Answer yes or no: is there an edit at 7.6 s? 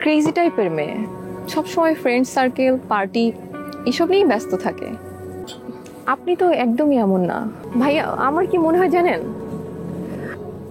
yes